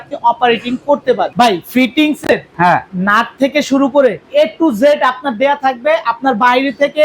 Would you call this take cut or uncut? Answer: cut